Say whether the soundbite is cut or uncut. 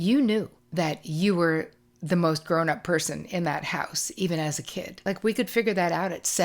cut